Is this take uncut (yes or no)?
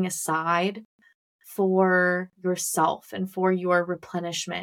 yes